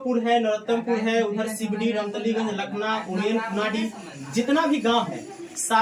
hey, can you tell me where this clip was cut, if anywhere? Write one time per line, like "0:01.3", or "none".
none